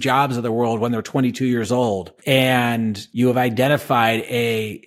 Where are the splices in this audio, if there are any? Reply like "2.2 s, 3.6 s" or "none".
2.1 s, 3.0 s